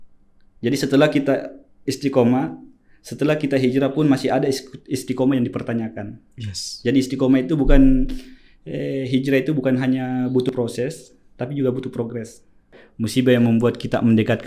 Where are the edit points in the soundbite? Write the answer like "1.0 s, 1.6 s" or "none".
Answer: 12.8 s